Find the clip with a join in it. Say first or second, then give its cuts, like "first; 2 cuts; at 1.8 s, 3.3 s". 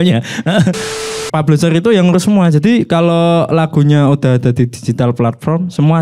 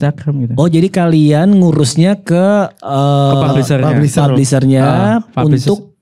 first; 1 cut; at 1.0 s